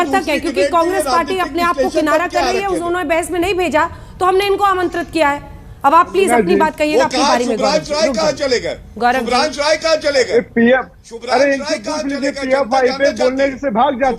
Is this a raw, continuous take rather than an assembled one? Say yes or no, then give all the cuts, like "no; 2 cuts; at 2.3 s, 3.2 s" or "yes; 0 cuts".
yes; 0 cuts